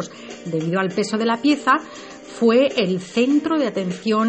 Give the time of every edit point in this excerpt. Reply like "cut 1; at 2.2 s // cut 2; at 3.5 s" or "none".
cut 1; at 1.6 s